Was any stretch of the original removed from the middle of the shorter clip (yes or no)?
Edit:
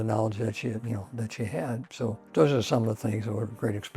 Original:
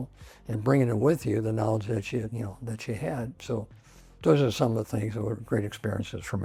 yes